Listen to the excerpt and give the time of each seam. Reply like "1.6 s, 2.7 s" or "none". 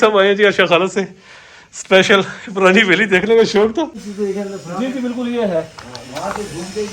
4.0 s